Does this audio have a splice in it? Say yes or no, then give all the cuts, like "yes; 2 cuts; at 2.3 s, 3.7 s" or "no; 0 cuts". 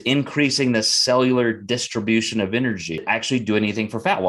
yes; 1 cut; at 3.0 s